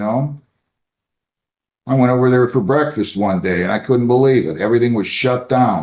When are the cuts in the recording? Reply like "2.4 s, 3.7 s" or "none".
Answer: none

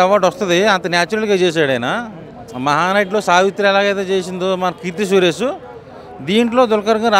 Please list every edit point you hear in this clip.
none

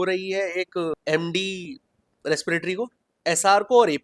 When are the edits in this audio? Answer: 1.0 s, 3.1 s

